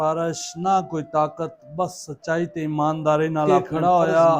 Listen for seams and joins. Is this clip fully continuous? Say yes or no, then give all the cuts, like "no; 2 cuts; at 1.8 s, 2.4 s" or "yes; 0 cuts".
no; 1 cut; at 3.5 s